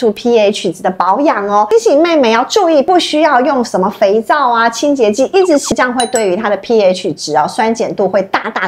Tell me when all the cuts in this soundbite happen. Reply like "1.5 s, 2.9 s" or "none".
1.7 s, 2.9 s, 5.7 s